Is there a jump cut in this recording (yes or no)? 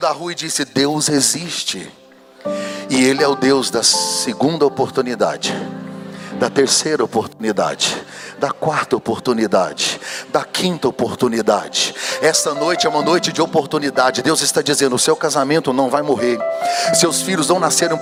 no